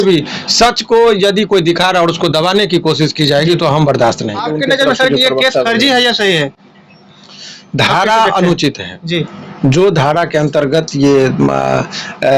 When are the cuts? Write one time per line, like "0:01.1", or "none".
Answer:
0:04.5